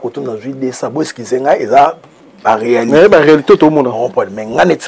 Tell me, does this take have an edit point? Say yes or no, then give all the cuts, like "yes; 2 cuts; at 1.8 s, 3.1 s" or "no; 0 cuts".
no; 0 cuts